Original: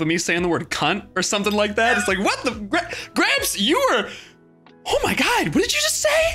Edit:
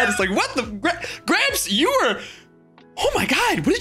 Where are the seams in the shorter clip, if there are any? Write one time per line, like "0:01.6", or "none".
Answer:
none